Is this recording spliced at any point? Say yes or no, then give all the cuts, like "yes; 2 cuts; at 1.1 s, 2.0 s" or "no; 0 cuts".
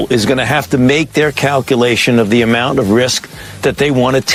no; 0 cuts